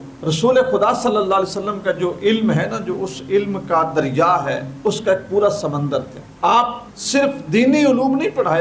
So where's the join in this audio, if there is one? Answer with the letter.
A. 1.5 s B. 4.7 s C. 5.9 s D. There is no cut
B